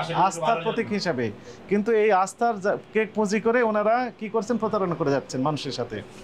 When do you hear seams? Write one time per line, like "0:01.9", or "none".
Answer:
none